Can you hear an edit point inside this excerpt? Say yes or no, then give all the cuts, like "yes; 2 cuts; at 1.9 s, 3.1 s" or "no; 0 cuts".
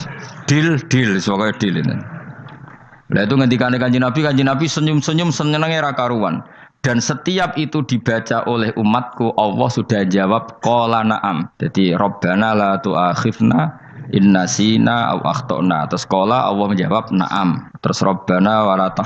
yes; 2 cuts; at 11.6 s, 17.7 s